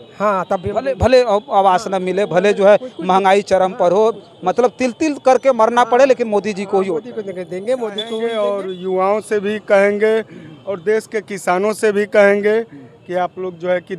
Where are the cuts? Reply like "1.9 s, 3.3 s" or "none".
8.3 s